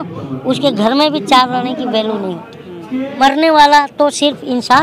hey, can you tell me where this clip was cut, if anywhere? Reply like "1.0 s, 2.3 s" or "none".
3.2 s